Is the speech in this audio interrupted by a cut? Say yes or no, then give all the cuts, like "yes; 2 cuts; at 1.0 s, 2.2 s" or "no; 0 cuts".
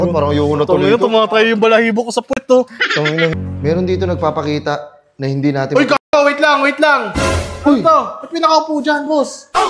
yes; 1 cut; at 3.4 s